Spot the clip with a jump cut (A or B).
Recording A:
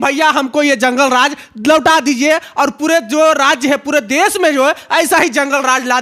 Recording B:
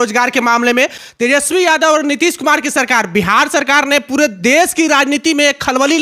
B